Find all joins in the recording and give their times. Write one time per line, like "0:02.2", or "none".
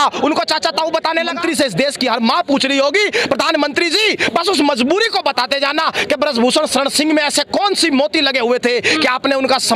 0:01.4